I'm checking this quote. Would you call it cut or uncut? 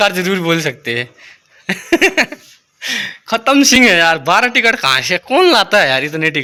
uncut